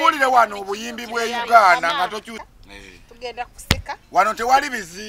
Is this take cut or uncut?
cut